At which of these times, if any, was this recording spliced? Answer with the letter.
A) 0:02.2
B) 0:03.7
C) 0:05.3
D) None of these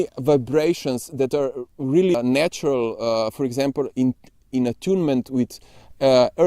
A